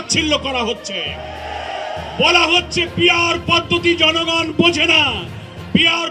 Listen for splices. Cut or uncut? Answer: uncut